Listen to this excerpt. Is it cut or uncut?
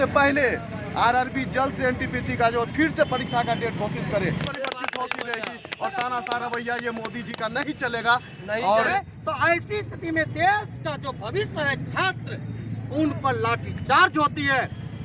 cut